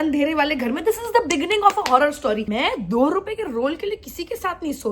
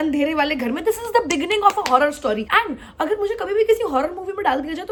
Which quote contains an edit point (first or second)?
first